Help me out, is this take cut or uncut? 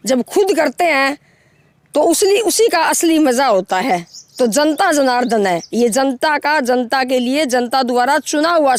uncut